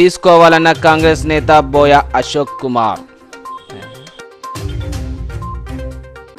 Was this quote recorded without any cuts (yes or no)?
yes